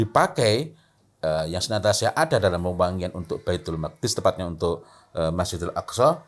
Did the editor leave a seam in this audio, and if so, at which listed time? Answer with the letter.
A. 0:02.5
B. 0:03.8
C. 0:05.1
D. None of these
D